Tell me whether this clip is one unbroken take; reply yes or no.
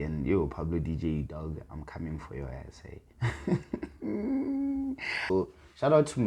no